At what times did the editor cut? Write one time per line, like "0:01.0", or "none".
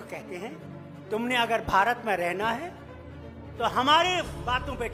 none